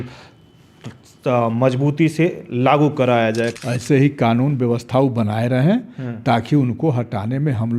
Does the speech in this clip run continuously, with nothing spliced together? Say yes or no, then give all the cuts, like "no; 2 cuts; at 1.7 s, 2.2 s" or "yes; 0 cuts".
no; 1 cut; at 3.6 s